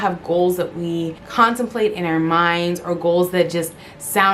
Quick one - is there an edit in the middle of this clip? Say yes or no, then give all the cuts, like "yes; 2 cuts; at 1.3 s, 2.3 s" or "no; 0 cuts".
yes; 1 cut; at 1.2 s